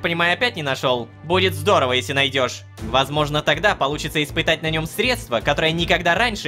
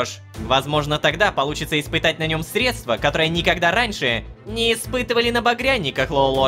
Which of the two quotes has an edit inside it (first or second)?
first